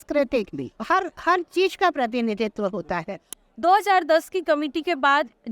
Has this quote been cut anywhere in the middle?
yes; 1 cut; at 3.2 s

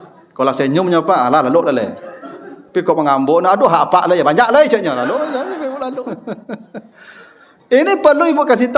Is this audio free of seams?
no; 1 cut; at 6.0 s

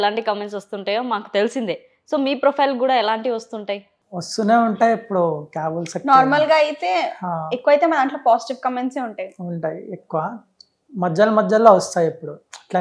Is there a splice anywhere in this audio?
no; 0 cuts

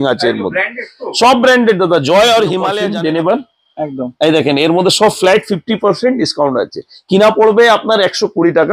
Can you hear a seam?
yes; 1 cut; at 2.8 s

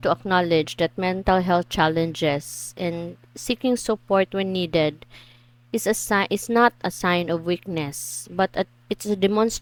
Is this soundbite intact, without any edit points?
yes; 0 cuts

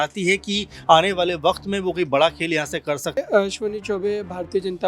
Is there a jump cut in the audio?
yes; 1 cut; at 3.2 s

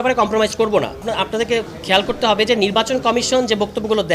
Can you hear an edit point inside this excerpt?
yes; 1 cut; at 0.9 s

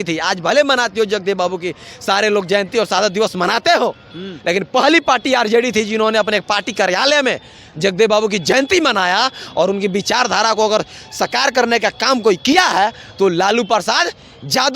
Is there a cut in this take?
no; 0 cuts

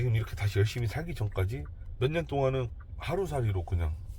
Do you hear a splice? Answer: yes; 2 cuts; at 1.8 s, 2.7 s

